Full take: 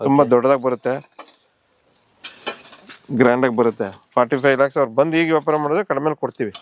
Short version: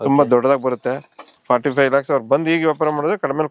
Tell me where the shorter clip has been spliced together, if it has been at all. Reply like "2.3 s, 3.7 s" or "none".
1.3 s